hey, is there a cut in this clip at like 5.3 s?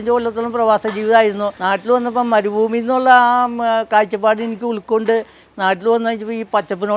no; 1 cut; at 1.5 s

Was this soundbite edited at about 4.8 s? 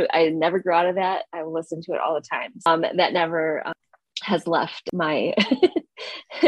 yes; 3 cuts; at 2.7 s, 3.8 s, 4.8 s

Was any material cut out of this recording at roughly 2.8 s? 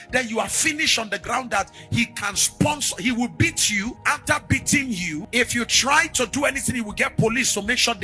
no; 2 cuts; at 4.0 s, 5.3 s

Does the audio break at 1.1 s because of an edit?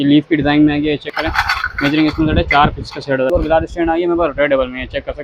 yes; 2 cuts; at 1.1 s, 3.3 s

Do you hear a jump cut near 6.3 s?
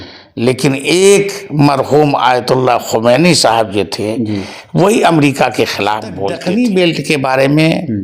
yes; 1 cut; at 6.3 s

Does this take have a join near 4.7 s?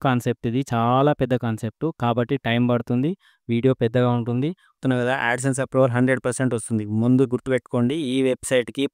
yes; 1 cut; at 4.7 s

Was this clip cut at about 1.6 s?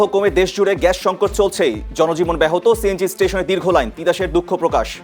no; 0 cuts

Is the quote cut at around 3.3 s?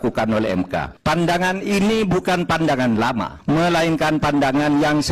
yes; 2 cuts; at 0.9 s, 3.3 s

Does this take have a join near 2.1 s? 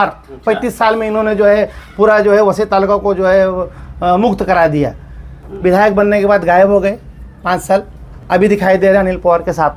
no; 0 cuts

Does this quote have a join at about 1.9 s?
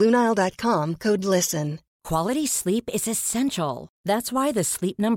yes; 1 cut; at 1.9 s

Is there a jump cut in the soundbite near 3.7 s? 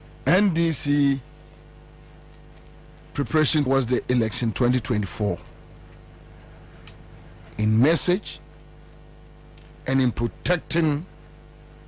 yes; 2 cuts; at 3.7 s, 9.5 s

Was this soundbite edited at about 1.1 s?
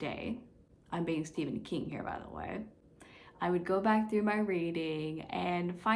no; 0 cuts

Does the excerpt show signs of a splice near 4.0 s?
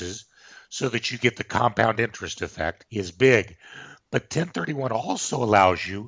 no; 1 cut; at 2.8 s

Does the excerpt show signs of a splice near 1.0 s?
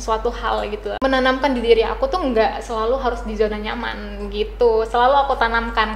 yes; 1 cut; at 1.0 s

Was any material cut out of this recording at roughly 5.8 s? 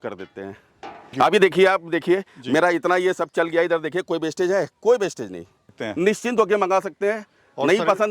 yes; 2 cuts; at 1.1 s, 5.8 s

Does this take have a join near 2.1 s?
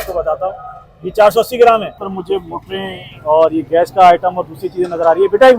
yes; 1 cut; at 2.1 s

